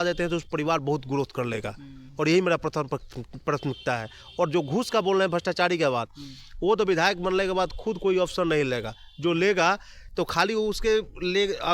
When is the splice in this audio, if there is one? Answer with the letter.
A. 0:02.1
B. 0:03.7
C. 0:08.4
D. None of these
D